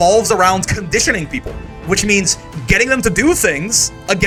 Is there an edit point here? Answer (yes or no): no